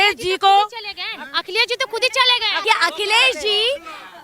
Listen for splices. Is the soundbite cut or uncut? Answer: cut